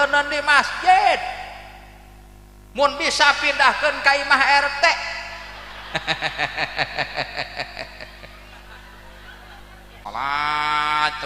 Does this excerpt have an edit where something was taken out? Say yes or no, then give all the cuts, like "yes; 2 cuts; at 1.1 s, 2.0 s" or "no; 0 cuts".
yes; 1 cut; at 10.0 s